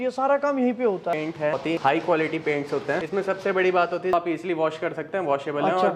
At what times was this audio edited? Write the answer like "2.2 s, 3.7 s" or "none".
1.6 s, 3.0 s, 4.1 s